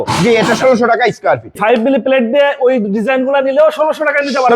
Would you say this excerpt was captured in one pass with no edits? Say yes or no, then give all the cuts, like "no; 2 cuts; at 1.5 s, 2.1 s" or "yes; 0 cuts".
no; 1 cut; at 1.6 s